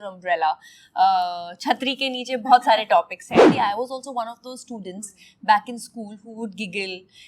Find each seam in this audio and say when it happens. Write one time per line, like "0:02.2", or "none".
0:03.5